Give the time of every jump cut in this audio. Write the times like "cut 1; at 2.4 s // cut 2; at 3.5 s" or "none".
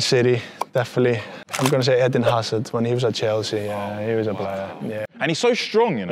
cut 1; at 1.4 s // cut 2; at 4.9 s